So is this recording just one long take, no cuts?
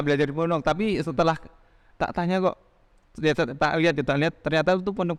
yes; 0 cuts

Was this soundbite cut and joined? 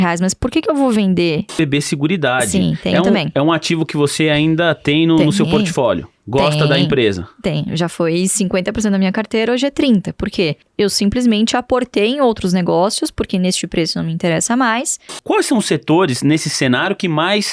yes; 3 cuts; at 1.5 s, 10.6 s, 15.2 s

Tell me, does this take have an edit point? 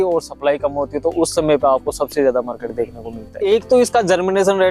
yes; 1 cut; at 3.4 s

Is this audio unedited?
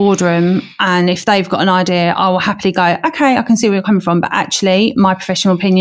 yes; 0 cuts

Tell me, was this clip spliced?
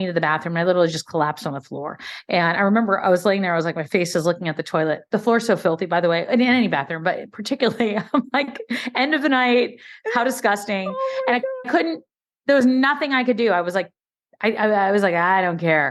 no; 0 cuts

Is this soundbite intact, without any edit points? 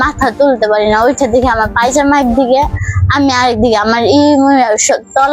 yes; 0 cuts

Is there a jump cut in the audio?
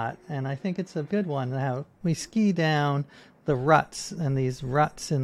yes; 2 cuts; at 1.1 s, 1.9 s

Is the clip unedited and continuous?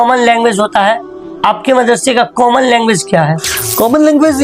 yes; 0 cuts

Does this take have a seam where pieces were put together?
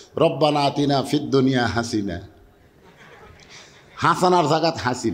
no; 0 cuts

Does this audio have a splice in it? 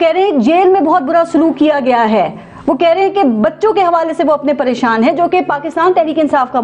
no; 0 cuts

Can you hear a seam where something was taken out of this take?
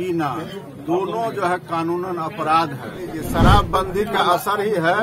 yes; 1 cut; at 3.2 s

